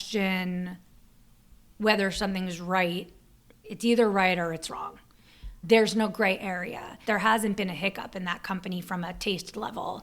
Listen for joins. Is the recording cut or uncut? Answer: cut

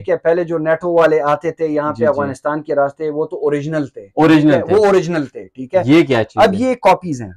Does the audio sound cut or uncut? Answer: uncut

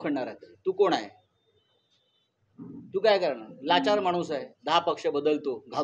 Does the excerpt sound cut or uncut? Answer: uncut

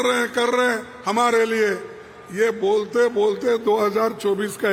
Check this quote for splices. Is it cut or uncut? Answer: uncut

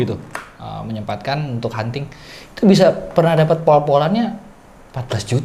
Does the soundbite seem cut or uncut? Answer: uncut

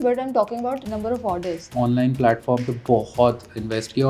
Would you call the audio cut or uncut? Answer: cut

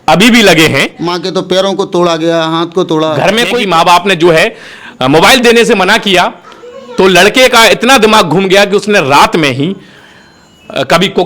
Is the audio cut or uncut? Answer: cut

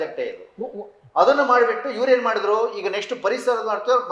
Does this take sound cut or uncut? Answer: uncut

